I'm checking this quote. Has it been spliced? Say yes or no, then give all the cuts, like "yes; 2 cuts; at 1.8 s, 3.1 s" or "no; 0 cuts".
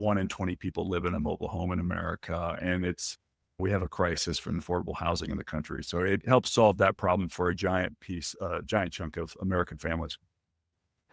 no; 0 cuts